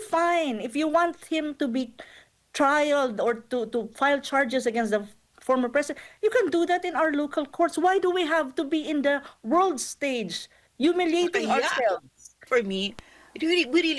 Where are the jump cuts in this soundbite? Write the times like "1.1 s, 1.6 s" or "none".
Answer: 12.5 s